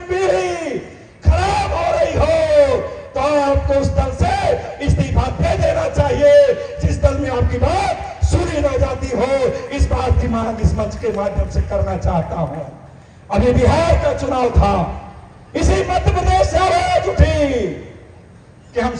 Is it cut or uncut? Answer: uncut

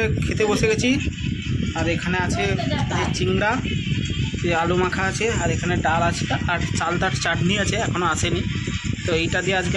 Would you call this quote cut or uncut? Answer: uncut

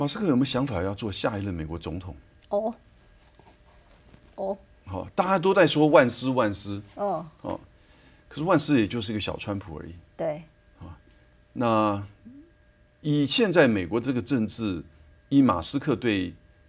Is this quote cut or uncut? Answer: uncut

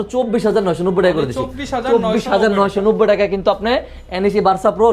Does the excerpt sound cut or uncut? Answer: uncut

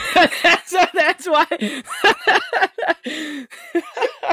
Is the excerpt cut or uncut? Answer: uncut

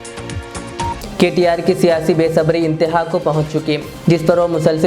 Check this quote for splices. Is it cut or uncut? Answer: cut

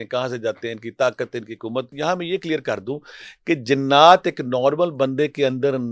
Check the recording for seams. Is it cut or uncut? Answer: cut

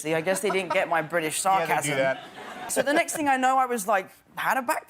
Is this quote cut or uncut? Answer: cut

